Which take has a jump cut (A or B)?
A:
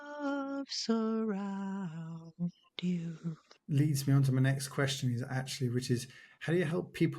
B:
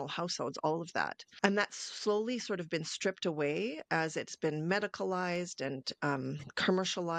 A